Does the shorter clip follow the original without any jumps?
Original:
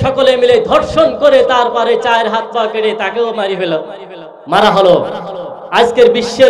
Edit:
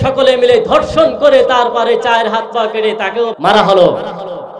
no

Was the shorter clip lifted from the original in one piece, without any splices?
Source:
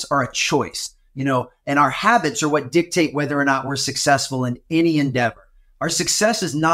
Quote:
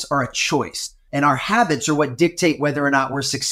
no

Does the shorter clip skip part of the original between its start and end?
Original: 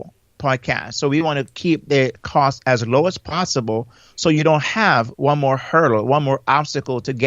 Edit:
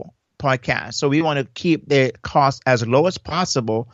no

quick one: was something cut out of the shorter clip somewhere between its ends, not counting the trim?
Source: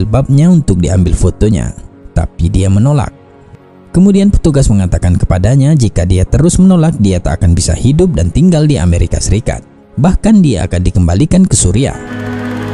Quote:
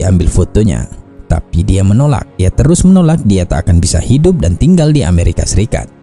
yes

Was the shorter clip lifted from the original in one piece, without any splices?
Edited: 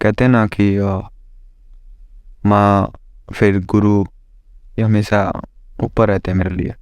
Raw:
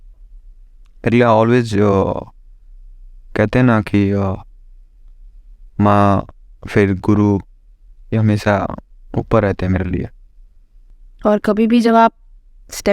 yes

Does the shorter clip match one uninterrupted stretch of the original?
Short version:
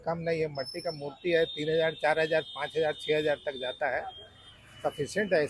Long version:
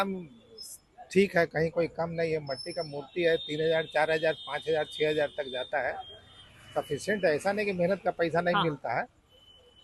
yes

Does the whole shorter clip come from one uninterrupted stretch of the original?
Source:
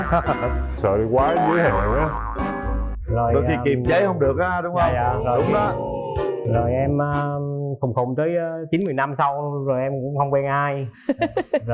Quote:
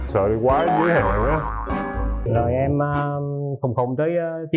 no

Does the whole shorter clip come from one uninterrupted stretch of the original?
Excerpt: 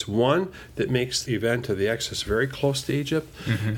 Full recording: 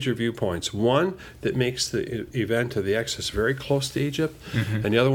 no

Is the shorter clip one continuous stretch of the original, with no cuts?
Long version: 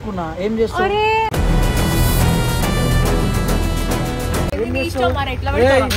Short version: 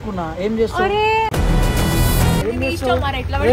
no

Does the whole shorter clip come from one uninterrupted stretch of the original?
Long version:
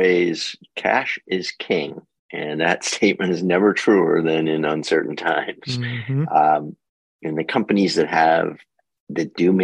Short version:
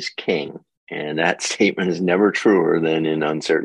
yes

